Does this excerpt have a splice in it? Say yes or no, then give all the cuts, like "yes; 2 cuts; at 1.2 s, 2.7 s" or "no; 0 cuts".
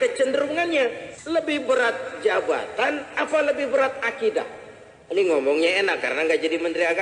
yes; 1 cut; at 1.1 s